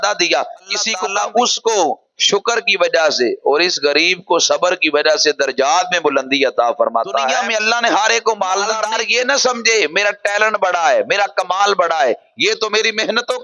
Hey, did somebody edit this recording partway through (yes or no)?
yes